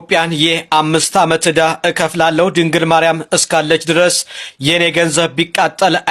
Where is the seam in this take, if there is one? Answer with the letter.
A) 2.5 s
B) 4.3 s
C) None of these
C